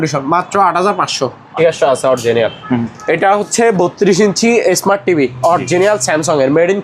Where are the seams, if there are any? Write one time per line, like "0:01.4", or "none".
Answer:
0:01.5